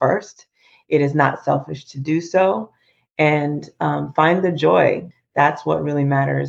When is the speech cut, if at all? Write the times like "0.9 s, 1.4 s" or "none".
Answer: 5.1 s

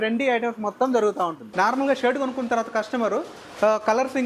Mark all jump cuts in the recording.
1.4 s

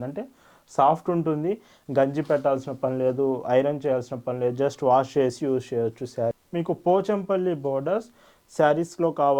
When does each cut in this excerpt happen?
6.4 s

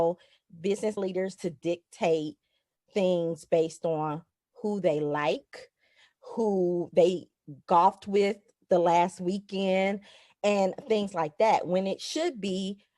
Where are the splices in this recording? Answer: 1.1 s

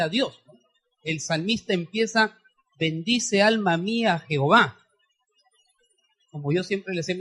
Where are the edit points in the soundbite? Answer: none

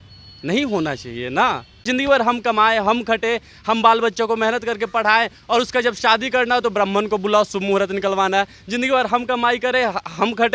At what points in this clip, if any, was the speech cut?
1.8 s

